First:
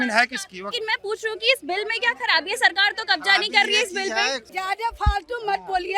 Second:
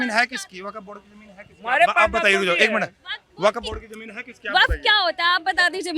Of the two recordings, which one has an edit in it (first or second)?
first